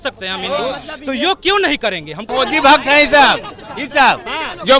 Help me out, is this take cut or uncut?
cut